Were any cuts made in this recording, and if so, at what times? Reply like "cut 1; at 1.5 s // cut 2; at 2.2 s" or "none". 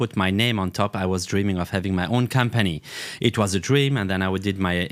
none